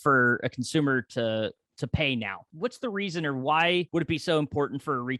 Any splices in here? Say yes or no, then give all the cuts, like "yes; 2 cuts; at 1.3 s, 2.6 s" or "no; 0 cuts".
yes; 2 cuts; at 2.4 s, 3.9 s